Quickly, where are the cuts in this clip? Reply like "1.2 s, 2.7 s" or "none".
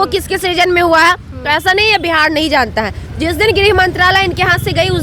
none